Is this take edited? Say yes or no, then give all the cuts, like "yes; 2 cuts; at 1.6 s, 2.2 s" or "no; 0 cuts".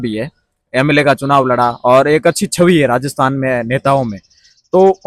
no; 0 cuts